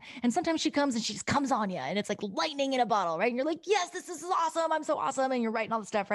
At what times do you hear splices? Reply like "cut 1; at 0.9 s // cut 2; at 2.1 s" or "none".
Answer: none